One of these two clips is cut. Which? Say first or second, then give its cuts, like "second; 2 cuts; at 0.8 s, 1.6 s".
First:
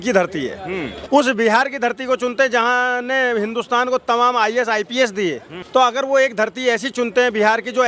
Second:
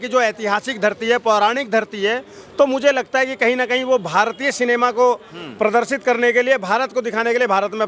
first; 2 cuts; at 0.9 s, 5.5 s